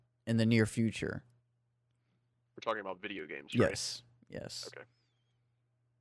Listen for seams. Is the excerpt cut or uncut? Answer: uncut